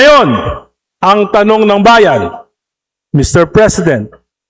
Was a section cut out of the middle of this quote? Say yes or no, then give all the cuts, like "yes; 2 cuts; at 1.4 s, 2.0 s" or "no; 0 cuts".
no; 0 cuts